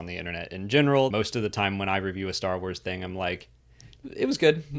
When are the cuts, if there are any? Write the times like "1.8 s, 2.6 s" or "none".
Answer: 1.1 s

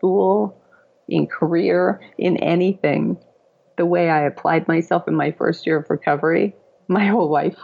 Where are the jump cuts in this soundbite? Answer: 6.7 s

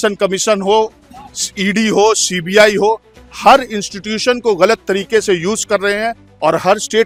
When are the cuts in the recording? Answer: none

